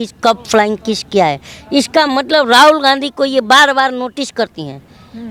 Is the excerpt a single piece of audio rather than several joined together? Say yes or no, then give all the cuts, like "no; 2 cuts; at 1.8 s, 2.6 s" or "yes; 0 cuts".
yes; 0 cuts